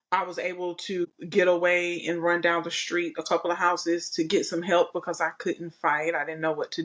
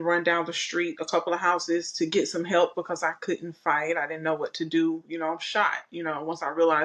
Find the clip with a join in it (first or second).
first